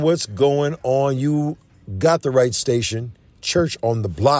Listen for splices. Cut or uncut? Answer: cut